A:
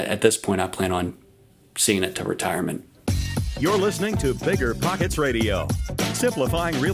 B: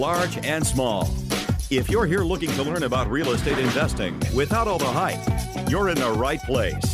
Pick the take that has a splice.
A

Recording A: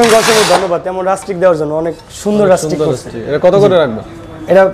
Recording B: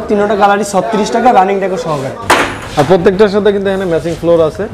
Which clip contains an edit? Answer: B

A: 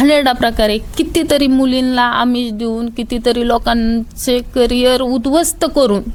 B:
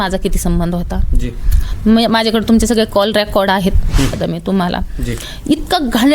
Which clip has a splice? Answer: B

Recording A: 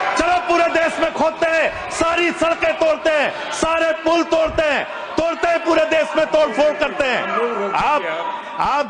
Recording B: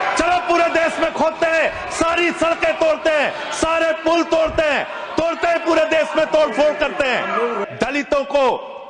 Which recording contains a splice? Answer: B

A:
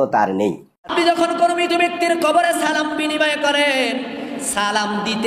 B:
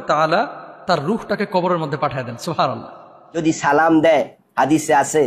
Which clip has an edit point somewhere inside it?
B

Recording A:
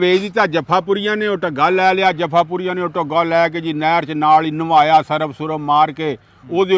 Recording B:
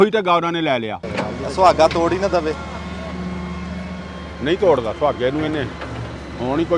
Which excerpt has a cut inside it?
B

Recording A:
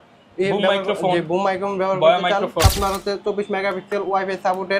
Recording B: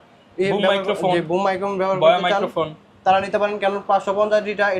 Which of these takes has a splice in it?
A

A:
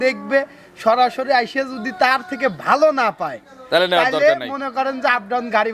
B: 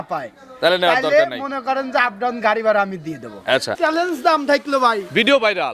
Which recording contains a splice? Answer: B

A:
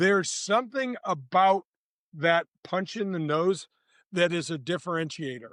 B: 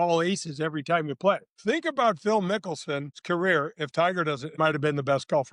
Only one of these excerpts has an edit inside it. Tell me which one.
B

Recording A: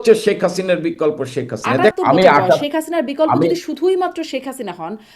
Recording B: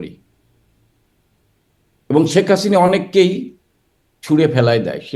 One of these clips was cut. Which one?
A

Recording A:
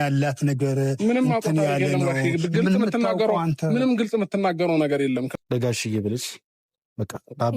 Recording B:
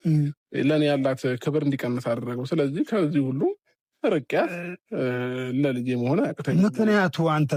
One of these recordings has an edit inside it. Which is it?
A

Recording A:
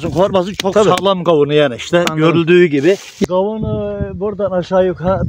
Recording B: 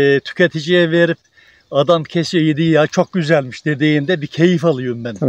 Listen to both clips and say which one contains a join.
A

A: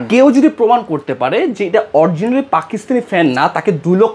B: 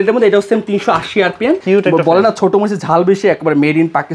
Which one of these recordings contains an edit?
B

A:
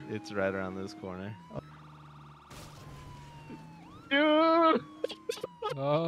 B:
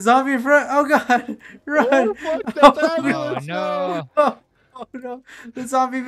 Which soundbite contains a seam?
A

